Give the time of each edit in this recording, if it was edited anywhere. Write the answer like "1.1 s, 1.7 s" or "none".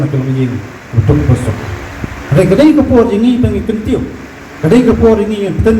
1.6 s